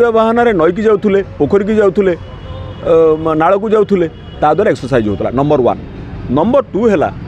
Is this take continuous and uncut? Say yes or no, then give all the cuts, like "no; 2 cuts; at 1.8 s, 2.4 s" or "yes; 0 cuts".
yes; 0 cuts